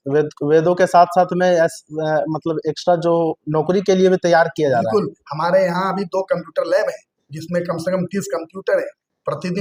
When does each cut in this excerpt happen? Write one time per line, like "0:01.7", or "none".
none